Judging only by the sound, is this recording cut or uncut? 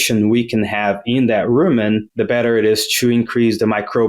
cut